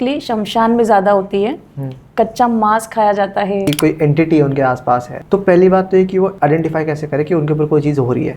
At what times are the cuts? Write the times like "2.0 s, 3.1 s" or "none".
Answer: 3.6 s